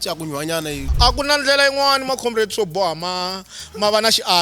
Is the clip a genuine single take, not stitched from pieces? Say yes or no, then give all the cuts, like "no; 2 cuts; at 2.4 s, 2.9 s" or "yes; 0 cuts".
no; 1 cut; at 0.9 s